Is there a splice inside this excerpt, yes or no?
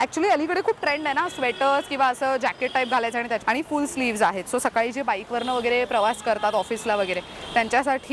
yes